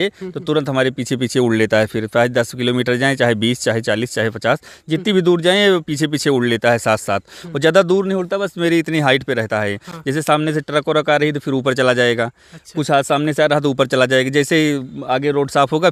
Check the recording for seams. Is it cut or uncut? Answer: uncut